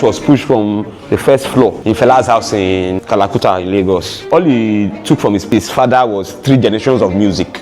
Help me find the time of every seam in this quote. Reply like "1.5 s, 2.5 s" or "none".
4.2 s, 5.5 s